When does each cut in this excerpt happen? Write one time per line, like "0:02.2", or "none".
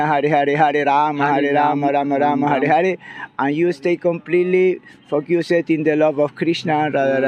none